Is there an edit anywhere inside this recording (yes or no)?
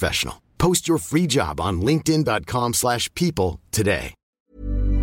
no